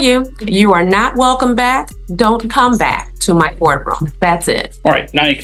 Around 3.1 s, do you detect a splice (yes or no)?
no